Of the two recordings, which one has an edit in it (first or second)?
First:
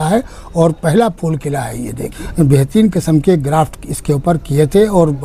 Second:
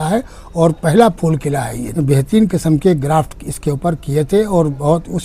second